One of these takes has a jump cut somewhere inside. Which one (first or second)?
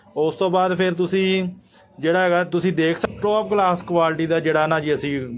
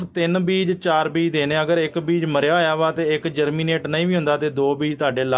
first